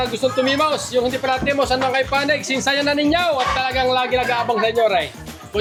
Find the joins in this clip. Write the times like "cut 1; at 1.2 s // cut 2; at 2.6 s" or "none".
none

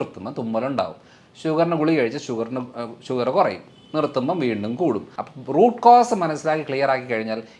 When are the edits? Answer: cut 1; at 5.1 s

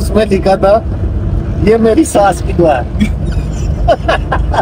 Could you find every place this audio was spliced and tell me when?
none

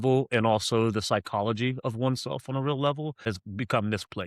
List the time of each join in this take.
cut 1; at 3.3 s

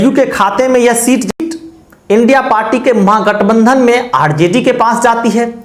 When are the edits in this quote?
cut 1; at 1.4 s

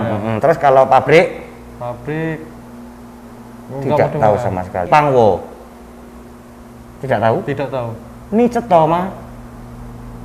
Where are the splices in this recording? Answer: cut 1; at 4.9 s

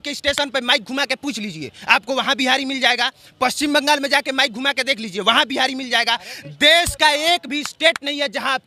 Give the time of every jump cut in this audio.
none

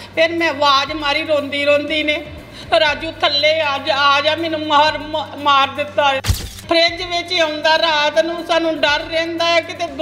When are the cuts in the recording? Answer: cut 1; at 6.5 s

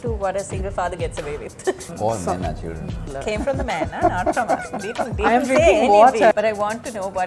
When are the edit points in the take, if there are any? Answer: cut 1; at 1.9 s // cut 2; at 3.1 s // cut 3; at 6.3 s

